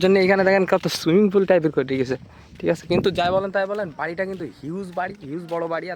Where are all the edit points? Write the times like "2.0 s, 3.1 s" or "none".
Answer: none